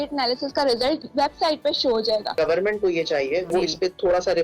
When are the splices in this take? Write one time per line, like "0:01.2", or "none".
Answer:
0:01.1
0:02.3
0:03.5